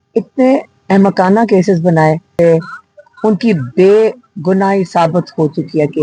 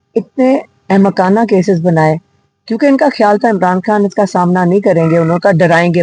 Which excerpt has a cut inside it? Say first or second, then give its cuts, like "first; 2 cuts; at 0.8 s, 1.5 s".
first; 1 cut; at 2.3 s